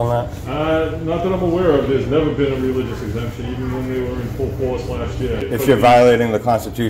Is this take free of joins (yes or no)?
no